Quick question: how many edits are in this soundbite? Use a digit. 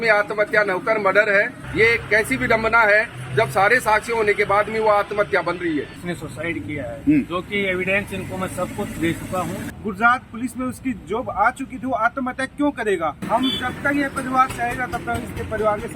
4